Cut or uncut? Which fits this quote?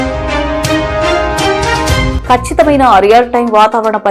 uncut